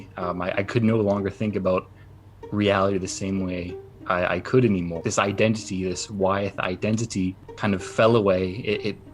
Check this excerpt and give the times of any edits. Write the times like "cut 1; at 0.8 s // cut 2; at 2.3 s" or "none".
cut 1; at 4.9 s // cut 2; at 7.5 s